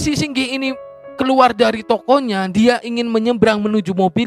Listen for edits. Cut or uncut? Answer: uncut